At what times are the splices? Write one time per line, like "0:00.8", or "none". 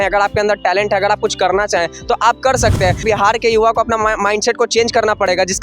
0:03.0